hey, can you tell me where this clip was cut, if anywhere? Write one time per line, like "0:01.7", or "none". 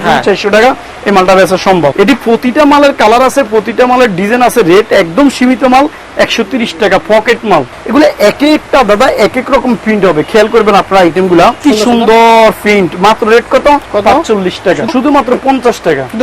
0:01.9
0:07.7
0:11.6
0:14.9